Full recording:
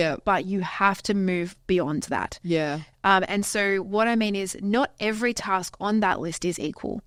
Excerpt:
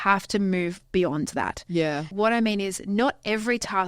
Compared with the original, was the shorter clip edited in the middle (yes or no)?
yes